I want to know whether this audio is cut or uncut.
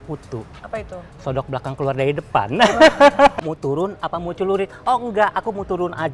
cut